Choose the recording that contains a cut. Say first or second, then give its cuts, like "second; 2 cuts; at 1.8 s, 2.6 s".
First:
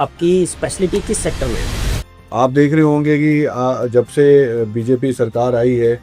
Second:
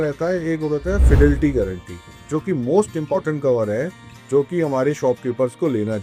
first; 1 cut; at 1.8 s